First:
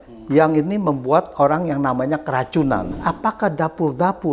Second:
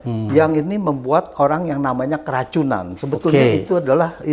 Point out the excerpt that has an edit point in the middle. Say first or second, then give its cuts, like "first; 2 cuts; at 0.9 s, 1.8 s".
first; 1 cut; at 2.9 s